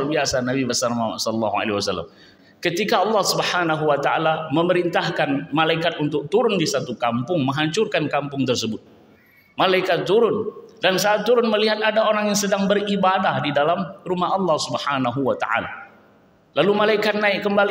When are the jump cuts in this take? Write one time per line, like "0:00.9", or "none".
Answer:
0:02.3